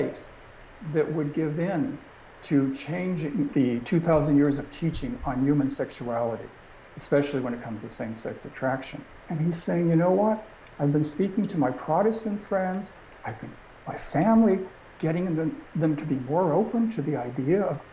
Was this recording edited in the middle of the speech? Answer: yes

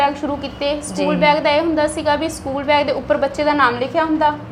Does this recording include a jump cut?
no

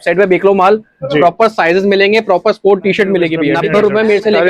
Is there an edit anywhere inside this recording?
yes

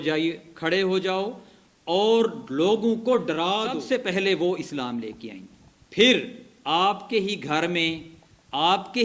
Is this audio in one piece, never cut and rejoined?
no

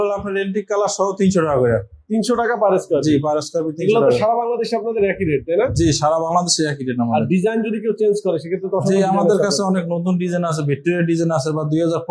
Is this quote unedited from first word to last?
yes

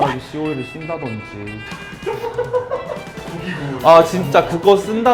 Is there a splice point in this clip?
no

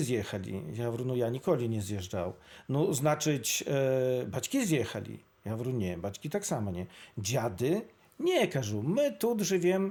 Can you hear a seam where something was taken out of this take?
no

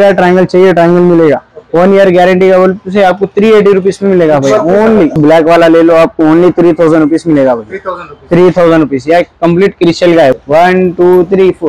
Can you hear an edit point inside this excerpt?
yes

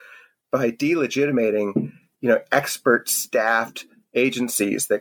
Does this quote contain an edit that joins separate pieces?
no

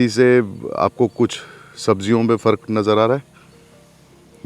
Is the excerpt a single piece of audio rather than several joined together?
yes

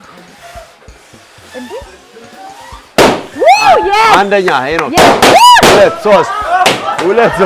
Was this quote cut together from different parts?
no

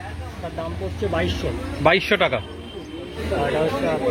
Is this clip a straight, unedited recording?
no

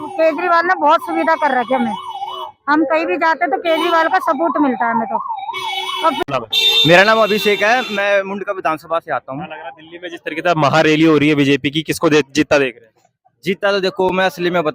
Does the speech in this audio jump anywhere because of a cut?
no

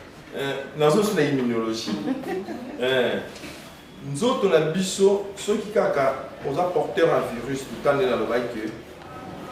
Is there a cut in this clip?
no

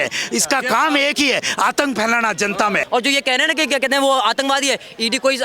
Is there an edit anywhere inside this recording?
yes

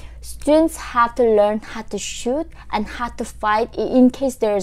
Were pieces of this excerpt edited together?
no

